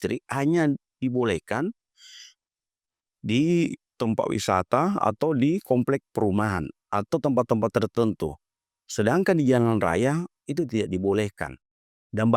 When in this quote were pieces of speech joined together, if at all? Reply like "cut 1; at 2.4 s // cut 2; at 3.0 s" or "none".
none